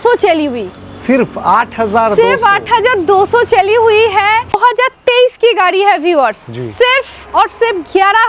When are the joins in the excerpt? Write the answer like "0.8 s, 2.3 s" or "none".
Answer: 4.6 s